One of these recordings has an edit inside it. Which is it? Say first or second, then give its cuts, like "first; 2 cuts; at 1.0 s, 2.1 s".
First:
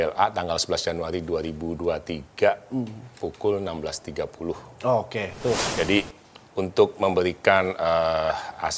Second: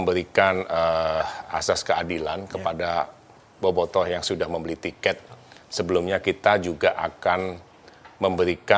first; 1 cut; at 5.7 s